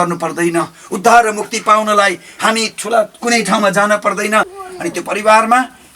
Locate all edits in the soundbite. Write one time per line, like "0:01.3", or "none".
0:04.6

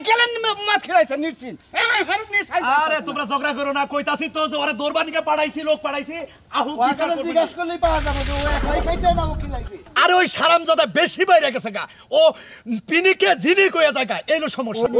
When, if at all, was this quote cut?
none

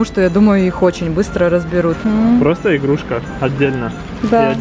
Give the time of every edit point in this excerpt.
0:02.0

